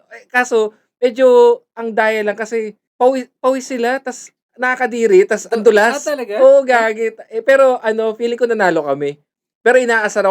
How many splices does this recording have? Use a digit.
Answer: 1